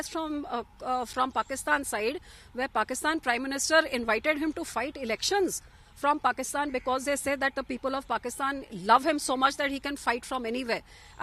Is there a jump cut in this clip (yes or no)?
no